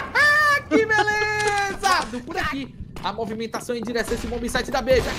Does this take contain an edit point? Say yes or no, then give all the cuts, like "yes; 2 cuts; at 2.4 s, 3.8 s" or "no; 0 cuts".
yes; 1 cut; at 1.9 s